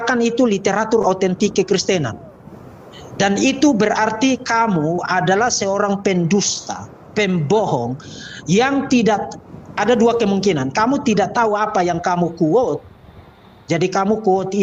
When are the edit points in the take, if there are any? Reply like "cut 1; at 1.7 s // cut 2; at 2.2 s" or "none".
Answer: none